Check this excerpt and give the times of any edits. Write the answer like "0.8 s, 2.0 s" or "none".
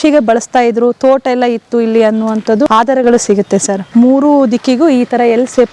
2.7 s, 3.8 s